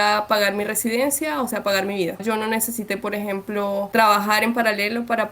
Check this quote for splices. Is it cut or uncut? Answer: cut